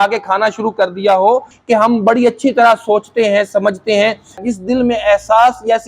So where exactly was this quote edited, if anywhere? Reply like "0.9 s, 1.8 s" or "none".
1.5 s, 4.4 s

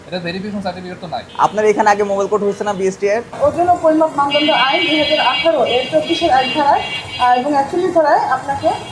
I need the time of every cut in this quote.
1.3 s, 3.4 s

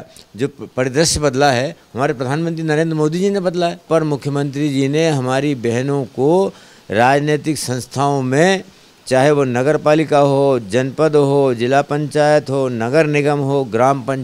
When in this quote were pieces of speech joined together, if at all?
3.9 s

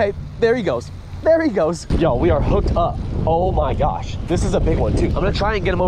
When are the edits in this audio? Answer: none

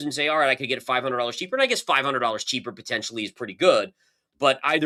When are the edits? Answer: none

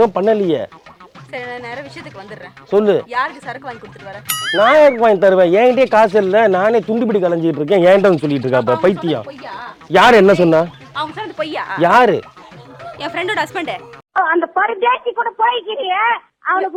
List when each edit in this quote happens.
none

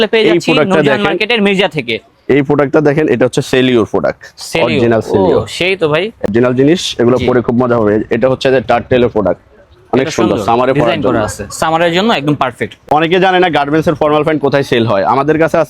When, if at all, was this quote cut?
6.3 s, 12.8 s

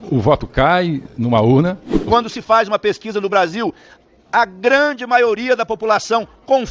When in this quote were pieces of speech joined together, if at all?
1.9 s

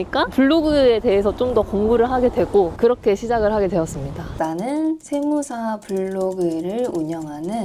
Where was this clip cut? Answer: 2.7 s, 4.4 s

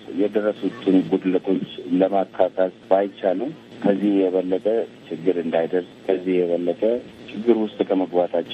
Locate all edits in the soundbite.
none

